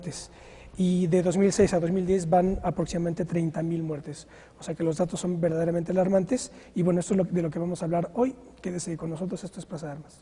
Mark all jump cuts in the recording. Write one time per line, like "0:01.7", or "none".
0:05.6